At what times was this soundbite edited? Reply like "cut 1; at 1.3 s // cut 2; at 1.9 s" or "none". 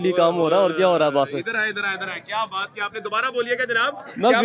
none

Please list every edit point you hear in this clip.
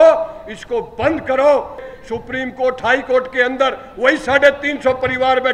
cut 1; at 1.9 s

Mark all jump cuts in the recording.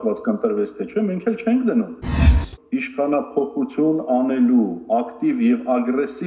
cut 1; at 2.3 s

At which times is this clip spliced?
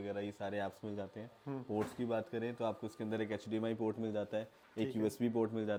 none

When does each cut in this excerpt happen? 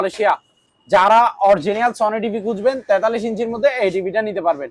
none

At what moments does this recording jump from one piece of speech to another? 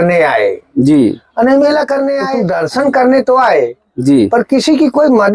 cut 1; at 2.4 s

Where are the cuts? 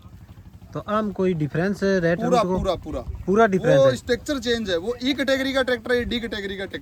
none

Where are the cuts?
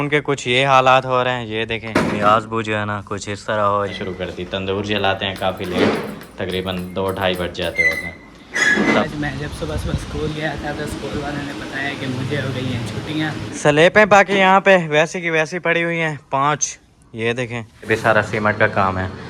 cut 1; at 4.0 s // cut 2; at 9.1 s // cut 3; at 13.5 s // cut 4; at 17.9 s

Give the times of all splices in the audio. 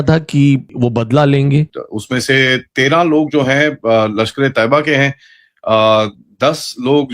cut 1; at 1.7 s

